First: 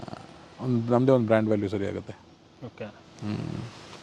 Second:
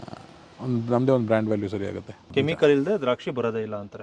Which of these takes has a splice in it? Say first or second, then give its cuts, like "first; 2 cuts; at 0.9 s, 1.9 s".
second; 1 cut; at 2.3 s